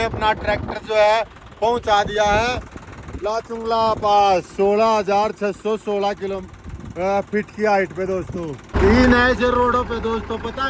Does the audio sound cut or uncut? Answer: cut